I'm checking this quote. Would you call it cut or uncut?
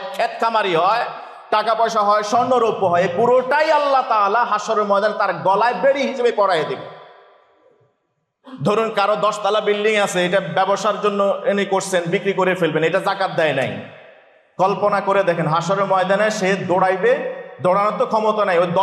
uncut